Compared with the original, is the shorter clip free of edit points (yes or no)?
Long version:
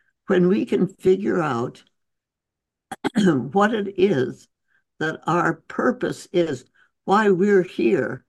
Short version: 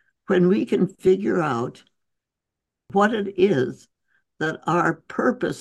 no